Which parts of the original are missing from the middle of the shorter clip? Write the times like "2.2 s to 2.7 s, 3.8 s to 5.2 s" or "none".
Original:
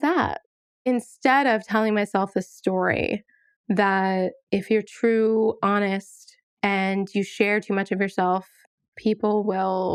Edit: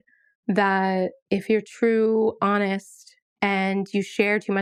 none